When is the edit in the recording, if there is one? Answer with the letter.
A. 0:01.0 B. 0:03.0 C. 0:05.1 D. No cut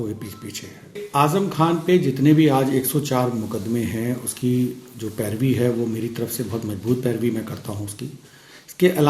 A